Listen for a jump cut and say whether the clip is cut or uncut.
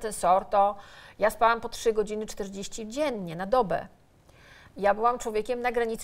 uncut